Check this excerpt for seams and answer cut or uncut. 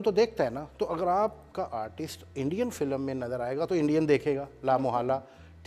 uncut